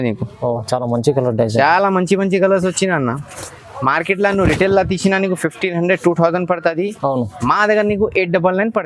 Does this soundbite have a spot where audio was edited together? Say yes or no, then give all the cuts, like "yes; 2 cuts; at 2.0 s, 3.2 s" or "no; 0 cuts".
no; 0 cuts